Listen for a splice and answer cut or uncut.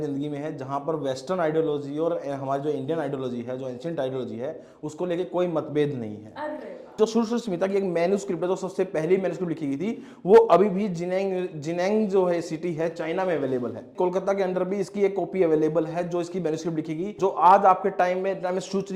cut